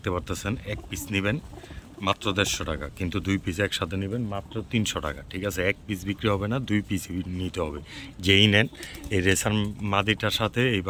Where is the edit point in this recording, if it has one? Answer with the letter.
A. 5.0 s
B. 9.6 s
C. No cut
C